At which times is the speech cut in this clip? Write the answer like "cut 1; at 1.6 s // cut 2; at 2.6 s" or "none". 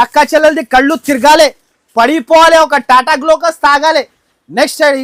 none